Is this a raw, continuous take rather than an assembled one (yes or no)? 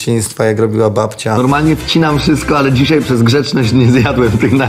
no